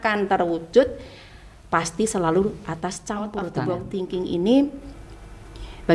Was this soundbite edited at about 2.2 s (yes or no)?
no